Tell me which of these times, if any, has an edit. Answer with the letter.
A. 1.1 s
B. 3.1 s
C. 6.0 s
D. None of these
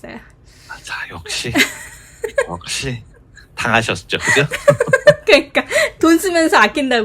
D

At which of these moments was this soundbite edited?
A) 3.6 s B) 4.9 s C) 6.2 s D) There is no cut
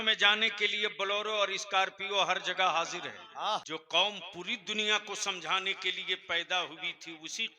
A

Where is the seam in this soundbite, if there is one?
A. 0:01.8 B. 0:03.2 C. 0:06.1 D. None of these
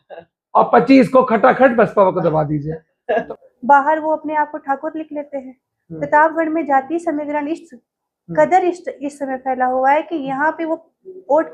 B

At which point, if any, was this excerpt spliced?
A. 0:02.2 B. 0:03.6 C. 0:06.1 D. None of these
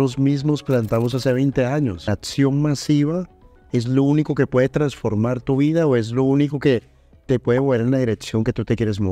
A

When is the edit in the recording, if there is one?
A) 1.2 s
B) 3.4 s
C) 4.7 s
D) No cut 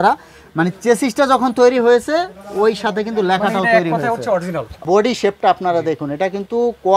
C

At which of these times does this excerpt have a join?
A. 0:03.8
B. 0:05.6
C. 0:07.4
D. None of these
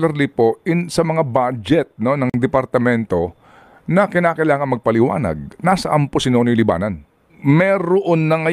C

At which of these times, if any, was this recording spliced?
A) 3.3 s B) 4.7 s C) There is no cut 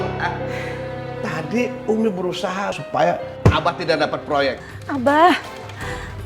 B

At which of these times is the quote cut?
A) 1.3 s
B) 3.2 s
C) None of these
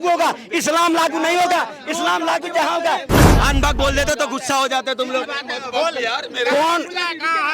B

